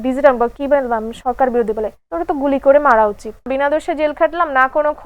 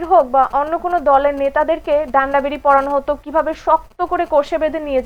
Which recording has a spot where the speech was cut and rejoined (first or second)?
first